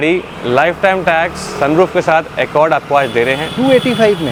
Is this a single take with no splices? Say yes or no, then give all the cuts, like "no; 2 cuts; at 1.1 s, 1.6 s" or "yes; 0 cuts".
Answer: yes; 0 cuts